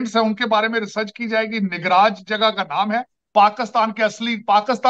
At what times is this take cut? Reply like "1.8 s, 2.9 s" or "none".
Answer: 3.2 s